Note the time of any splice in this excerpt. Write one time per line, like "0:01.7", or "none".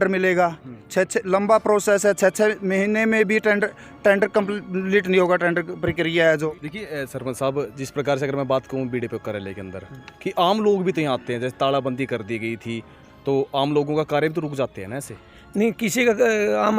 0:06.6